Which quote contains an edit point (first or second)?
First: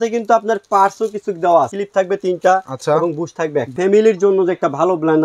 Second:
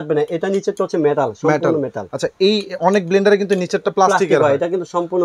first